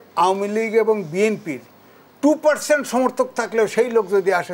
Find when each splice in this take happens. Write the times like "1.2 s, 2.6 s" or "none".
none